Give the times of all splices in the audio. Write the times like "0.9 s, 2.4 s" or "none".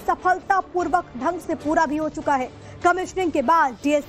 2.3 s